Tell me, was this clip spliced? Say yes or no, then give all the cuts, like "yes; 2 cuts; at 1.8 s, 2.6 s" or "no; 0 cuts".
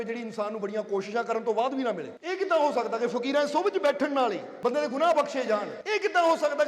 yes; 3 cuts; at 2.1 s, 4.5 s, 5.8 s